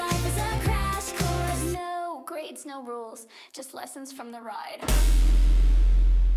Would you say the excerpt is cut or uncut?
uncut